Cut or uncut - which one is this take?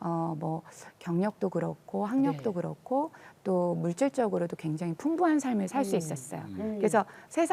uncut